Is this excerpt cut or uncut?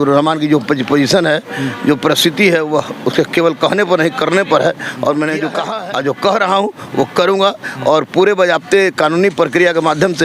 cut